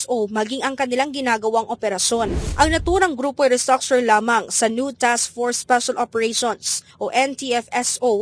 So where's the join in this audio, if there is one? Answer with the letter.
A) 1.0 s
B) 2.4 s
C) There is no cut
B